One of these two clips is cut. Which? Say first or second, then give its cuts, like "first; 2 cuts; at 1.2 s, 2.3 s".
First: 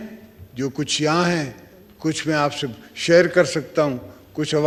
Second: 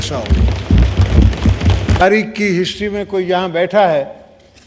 second; 1 cut; at 2.0 s